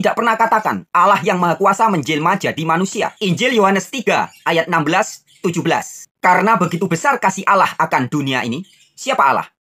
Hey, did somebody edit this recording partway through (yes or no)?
yes